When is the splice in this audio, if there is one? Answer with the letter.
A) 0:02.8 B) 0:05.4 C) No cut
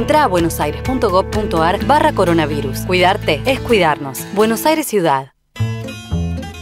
B